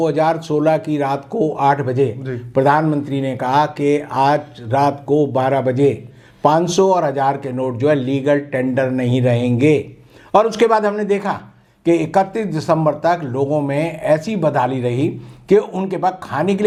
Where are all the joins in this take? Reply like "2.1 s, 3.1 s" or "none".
none

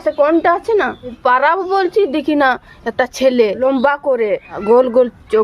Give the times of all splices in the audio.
1.2 s, 3.6 s, 4.5 s

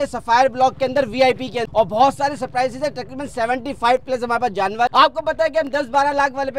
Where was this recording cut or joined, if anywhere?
1.6 s, 4.9 s

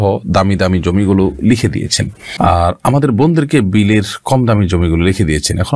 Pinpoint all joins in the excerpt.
none

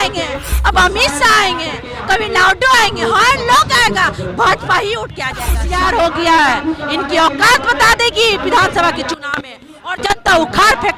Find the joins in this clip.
5.6 s

